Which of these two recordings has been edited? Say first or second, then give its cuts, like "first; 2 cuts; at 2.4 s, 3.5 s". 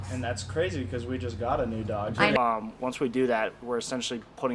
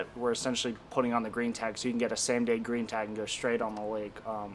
first; 1 cut; at 2.4 s